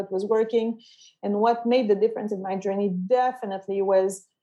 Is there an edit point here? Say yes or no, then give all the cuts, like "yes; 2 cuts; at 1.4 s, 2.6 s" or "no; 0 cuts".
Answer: no; 0 cuts